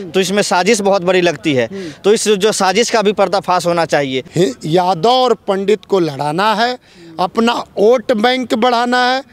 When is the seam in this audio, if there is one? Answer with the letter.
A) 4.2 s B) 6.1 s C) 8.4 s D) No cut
A